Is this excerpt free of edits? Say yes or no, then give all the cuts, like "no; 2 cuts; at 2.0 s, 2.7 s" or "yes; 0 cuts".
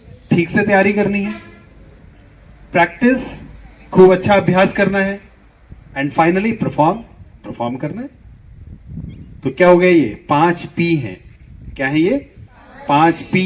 yes; 0 cuts